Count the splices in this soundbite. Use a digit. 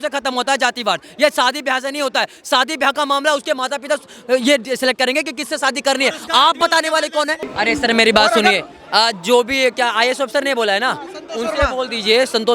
1